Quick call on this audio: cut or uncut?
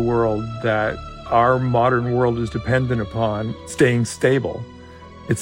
cut